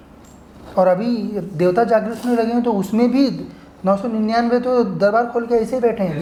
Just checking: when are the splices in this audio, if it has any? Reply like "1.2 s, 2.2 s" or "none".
none